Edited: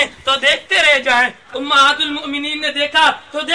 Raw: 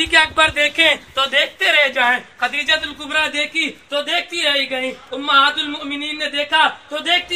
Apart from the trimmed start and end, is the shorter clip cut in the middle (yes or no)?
yes